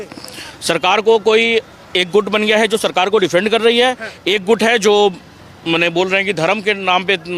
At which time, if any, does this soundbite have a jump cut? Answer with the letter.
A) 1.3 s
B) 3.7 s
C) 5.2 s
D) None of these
D